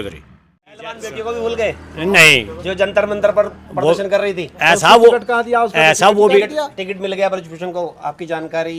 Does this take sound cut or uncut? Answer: cut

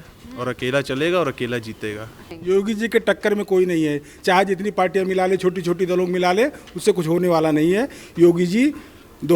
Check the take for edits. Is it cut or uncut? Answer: cut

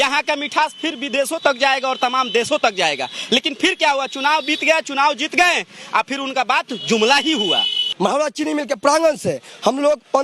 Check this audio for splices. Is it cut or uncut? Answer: cut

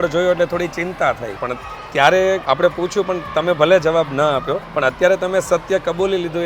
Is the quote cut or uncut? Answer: cut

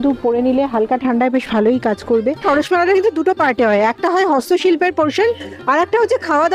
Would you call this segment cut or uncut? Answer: cut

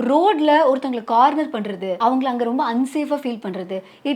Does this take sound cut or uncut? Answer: cut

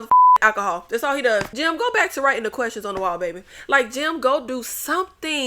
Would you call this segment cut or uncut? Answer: cut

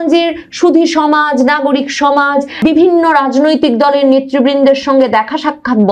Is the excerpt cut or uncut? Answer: uncut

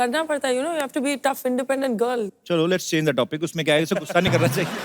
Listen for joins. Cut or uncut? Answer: cut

